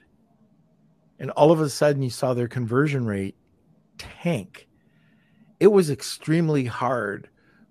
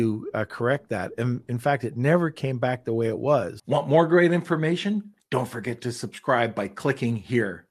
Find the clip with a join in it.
second; 1 cut; at 3.6 s

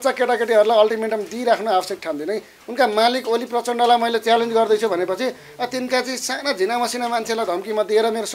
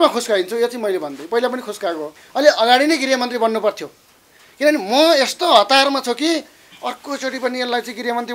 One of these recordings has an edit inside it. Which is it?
second; 1 cut; at 2.2 s

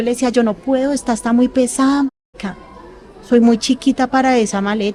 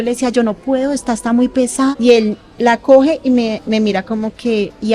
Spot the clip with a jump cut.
second; 1 cut; at 1.9 s

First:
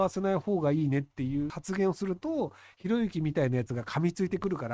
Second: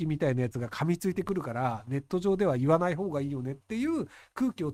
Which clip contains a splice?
first; 1 cut; at 1.6 s

